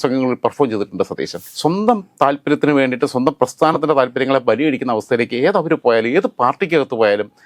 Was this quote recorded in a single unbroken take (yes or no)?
no